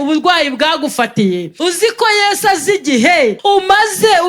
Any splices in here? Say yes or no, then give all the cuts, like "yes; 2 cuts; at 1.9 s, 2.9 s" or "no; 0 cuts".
yes; 2 cuts; at 1.5 s, 3.4 s